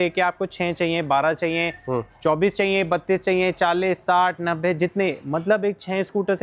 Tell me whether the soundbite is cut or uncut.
uncut